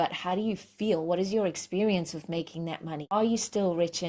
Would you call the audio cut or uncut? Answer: cut